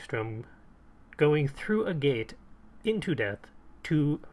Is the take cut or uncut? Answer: uncut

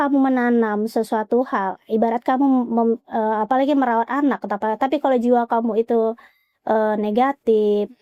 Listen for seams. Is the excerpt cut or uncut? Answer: uncut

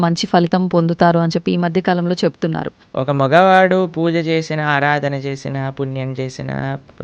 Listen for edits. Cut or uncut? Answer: cut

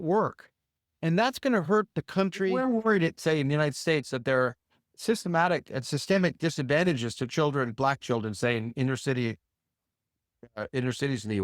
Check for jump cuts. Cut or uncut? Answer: cut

